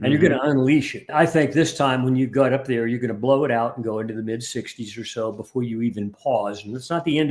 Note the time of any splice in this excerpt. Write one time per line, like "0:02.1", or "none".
0:01.0